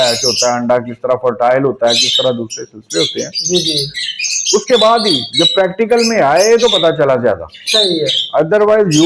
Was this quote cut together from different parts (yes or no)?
no